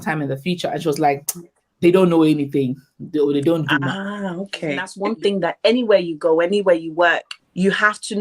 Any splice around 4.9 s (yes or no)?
yes